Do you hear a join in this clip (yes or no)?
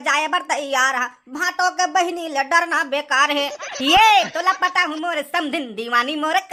no